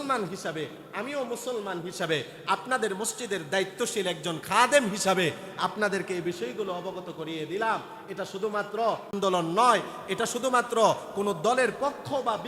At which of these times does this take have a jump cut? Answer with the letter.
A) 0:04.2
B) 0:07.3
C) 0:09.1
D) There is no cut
C